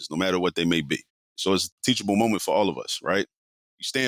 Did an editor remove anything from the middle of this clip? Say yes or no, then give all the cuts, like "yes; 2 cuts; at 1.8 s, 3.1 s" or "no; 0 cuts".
no; 0 cuts